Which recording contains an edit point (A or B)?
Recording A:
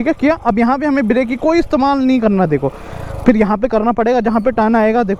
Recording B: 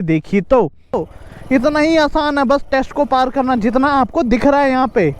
B